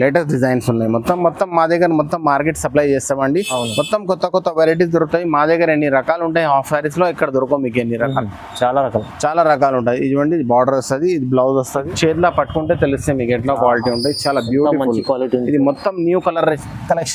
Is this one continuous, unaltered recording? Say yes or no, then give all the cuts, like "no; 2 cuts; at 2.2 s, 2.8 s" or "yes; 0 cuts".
no; 1 cut; at 11.9 s